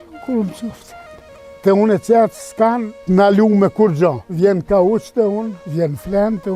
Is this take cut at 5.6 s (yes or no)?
yes